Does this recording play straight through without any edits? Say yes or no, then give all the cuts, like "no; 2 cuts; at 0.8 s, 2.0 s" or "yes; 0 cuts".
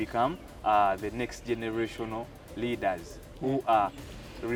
yes; 0 cuts